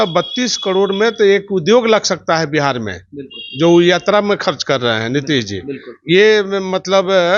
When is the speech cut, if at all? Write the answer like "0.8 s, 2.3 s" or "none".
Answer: none